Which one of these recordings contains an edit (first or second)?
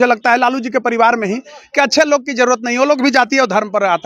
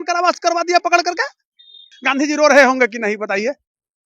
second